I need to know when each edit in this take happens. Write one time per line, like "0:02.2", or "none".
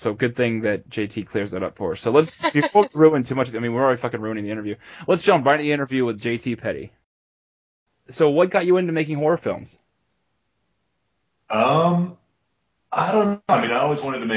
none